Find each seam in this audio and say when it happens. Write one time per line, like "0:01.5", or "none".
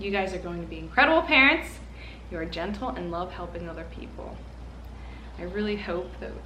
none